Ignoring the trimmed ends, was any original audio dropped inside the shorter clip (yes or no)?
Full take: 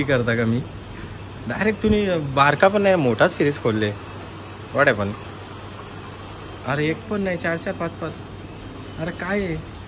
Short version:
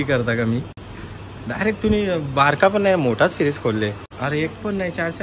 yes